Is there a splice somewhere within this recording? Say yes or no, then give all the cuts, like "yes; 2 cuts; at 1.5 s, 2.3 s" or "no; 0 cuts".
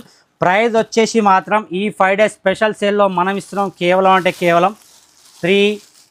no; 0 cuts